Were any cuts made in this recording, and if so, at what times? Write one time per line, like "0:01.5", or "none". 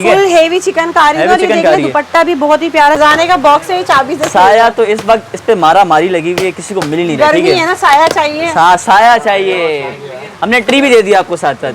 0:03.0

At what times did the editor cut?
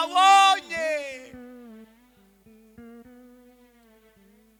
none

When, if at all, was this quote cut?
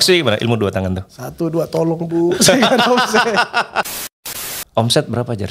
0:04.1

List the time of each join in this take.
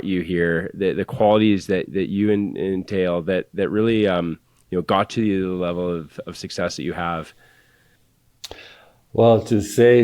none

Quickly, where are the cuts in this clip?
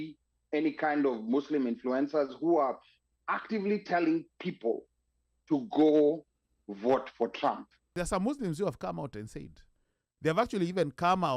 0:07.9

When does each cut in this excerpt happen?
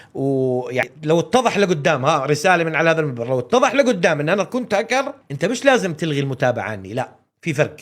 0:00.9
0:05.2

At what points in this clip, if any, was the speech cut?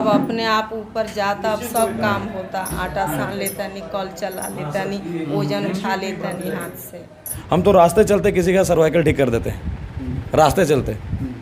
0:07.3

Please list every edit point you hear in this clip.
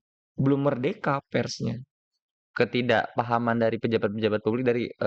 0:02.4

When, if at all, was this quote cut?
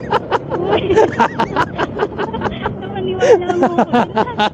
none

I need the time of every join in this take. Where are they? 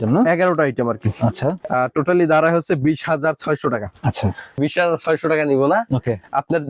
0:01.6
0:04.6

